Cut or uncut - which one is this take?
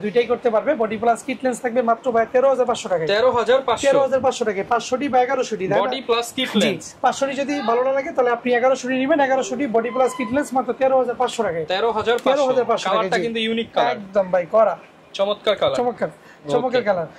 uncut